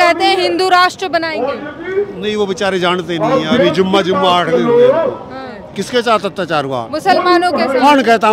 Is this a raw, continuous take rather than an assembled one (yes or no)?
no